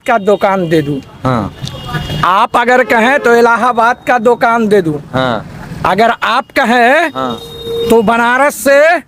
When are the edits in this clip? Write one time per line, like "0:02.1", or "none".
none